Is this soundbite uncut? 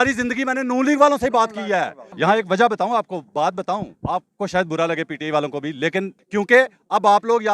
no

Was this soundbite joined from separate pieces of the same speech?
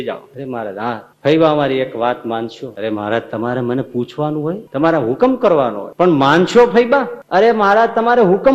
yes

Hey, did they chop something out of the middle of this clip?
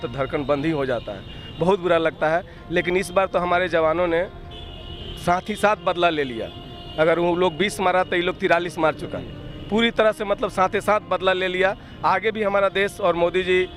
no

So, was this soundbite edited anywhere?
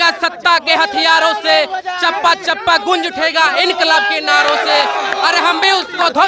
no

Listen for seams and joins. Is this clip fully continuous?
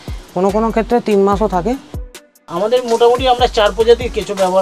no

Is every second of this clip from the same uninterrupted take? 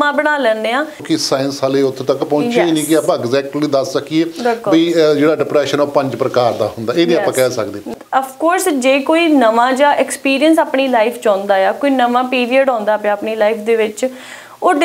no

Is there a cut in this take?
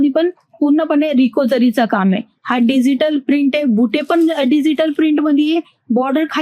no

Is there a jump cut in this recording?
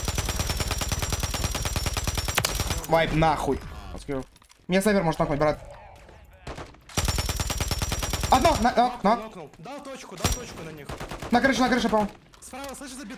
yes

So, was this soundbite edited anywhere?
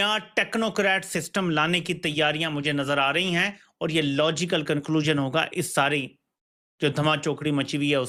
no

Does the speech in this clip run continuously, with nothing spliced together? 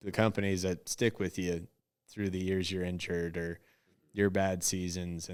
yes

